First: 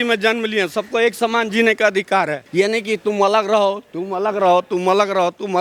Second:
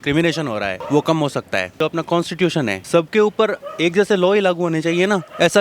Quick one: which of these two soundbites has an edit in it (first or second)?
second